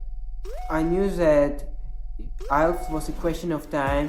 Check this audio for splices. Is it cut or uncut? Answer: uncut